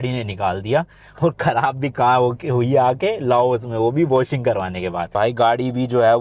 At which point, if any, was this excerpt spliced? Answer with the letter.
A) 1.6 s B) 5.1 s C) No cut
B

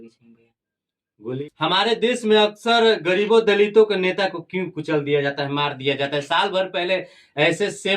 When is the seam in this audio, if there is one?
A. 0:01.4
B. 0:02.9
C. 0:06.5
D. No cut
A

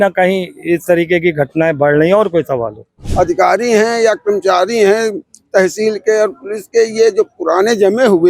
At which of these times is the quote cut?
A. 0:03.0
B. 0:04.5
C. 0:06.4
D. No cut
A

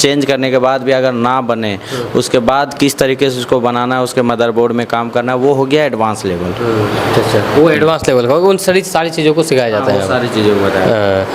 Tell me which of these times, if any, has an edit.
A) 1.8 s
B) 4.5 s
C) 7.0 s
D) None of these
D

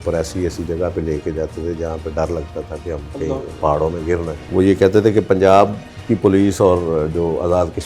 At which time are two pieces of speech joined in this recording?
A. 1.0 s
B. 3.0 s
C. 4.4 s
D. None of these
C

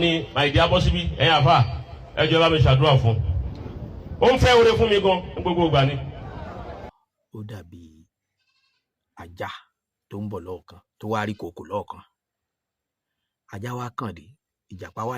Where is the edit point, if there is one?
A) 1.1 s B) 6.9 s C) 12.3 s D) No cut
B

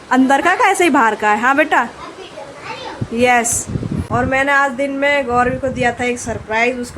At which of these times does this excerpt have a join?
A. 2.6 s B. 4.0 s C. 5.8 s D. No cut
B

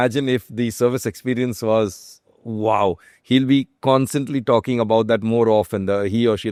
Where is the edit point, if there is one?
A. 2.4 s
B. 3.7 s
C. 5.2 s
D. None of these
D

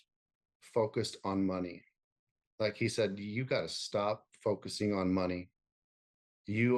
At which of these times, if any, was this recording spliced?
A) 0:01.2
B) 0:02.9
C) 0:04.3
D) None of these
D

